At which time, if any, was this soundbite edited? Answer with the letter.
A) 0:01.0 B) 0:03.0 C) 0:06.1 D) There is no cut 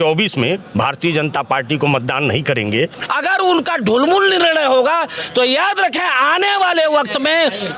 B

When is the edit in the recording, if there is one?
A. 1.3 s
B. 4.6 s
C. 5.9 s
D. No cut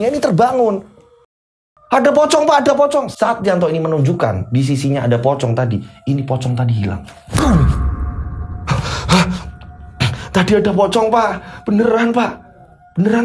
A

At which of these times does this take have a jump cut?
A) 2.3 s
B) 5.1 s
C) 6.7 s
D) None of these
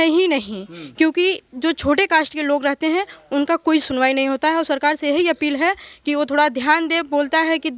D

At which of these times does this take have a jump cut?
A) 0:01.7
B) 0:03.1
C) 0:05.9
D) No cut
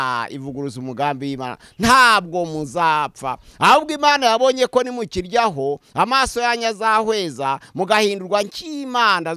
D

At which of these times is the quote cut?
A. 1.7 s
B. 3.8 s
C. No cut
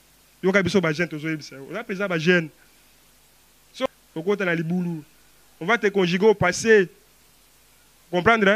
B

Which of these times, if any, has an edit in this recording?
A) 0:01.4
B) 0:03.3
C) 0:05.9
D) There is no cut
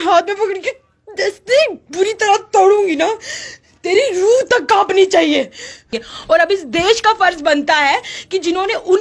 C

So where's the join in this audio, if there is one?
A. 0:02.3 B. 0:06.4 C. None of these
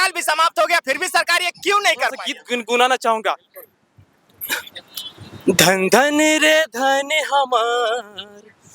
A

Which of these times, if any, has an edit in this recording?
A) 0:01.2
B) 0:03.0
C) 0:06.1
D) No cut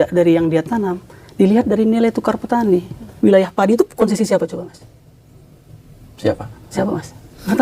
B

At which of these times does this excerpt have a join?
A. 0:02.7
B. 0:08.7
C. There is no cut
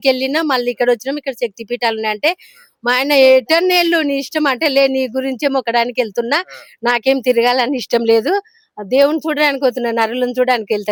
C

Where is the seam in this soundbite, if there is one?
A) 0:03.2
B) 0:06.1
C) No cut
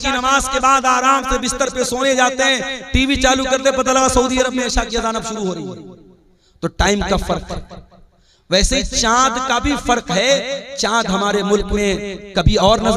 C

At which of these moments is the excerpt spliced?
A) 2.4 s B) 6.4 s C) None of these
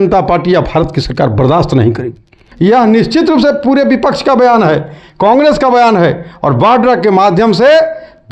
A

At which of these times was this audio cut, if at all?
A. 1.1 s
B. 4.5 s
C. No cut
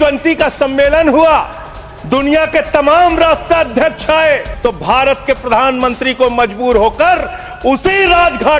B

